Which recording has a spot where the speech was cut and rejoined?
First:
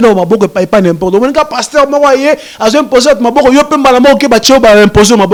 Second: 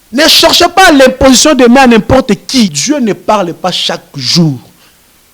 second; 1 cut; at 2.7 s

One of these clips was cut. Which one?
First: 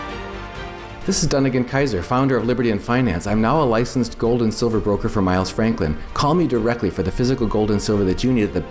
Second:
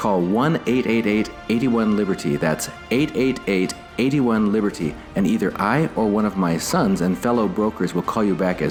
first; 1 cut; at 0.9 s

